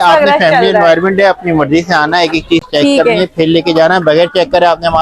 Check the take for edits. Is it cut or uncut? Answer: uncut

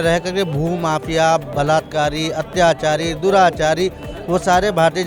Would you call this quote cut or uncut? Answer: uncut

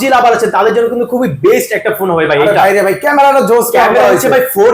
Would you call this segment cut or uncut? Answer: uncut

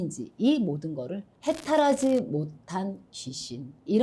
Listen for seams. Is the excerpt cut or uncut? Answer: cut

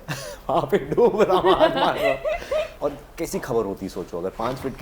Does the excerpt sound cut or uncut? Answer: cut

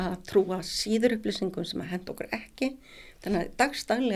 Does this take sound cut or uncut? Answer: uncut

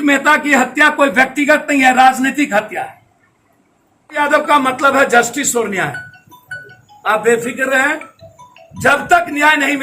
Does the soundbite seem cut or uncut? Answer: cut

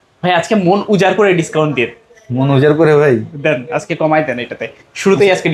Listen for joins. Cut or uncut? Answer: uncut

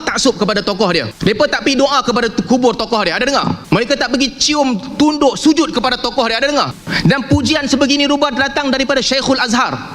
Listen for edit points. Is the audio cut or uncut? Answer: cut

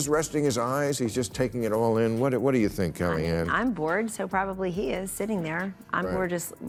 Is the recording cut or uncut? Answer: uncut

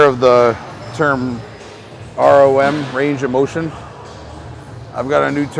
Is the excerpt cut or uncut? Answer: uncut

